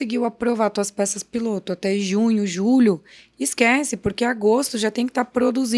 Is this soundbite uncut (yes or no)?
yes